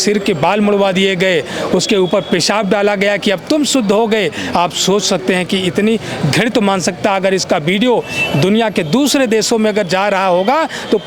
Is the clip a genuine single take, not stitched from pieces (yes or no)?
yes